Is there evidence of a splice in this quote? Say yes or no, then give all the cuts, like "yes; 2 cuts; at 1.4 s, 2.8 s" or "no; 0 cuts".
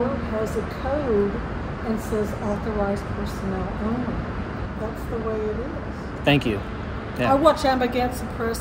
yes; 1 cut; at 4.6 s